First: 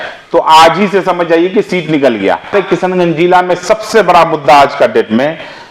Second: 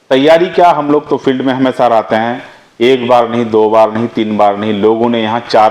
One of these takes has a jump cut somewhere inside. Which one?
first; 1 cut; at 2.5 s

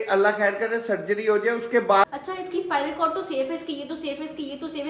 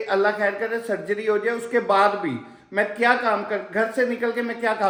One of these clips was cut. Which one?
first; 1 cut; at 2.0 s

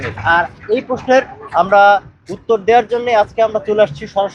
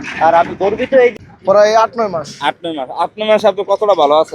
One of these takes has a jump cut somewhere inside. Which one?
second; 1 cut; at 1.1 s

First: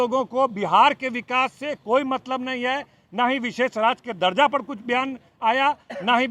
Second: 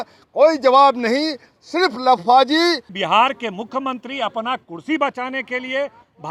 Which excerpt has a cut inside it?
second; 1 cut; at 2.9 s

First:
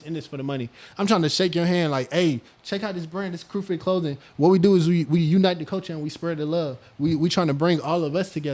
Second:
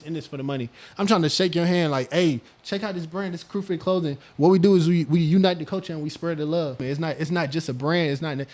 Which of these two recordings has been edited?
second; 1 cut; at 6.8 s

